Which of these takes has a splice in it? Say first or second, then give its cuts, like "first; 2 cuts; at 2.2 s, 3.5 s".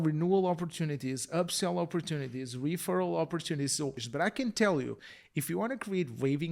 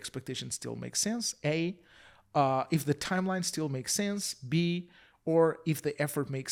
first; 1 cut; at 4.0 s